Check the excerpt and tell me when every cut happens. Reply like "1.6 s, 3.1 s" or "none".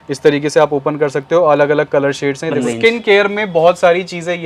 2.7 s